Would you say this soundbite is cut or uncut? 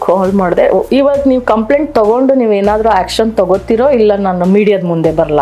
uncut